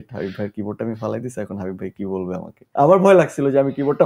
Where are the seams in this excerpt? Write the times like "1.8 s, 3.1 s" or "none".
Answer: 2.6 s